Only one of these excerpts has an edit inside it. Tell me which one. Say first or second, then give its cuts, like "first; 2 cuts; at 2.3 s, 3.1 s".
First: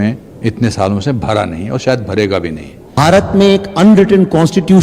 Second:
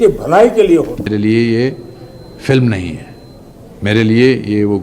second; 1 cut; at 1.0 s